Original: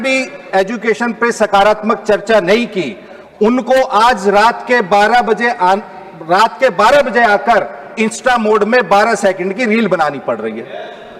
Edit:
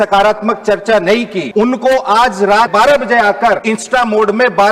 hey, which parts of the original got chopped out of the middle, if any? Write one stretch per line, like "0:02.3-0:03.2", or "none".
0:02.8-0:03.2
0:04.6-0:06.8
0:07.7-0:08.0